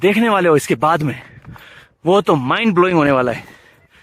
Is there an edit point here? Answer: no; 0 cuts

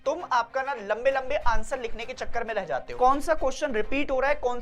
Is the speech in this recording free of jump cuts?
no; 1 cut; at 2.9 s

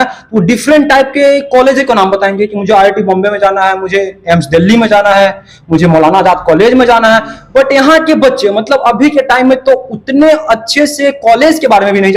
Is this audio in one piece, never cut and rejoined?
yes; 0 cuts

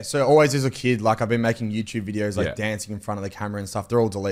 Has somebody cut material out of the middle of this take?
no; 0 cuts

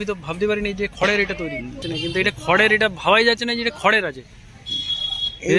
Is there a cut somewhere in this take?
yes; 1 cut; at 1.9 s

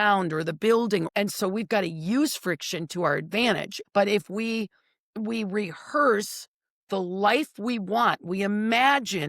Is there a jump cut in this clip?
yes; 2 cuts; at 1.1 s, 3.7 s

